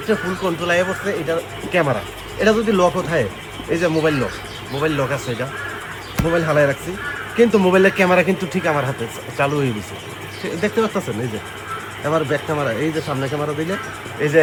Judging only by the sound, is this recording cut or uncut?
uncut